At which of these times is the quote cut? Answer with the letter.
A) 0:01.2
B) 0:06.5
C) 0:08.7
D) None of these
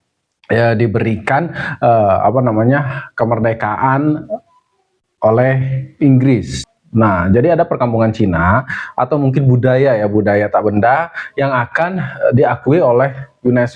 B